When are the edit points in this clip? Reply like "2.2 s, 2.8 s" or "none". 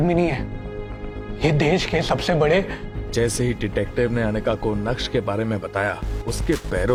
none